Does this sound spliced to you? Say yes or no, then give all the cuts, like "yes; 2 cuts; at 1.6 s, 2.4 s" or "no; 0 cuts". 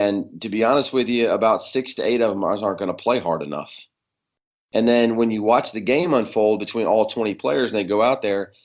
no; 0 cuts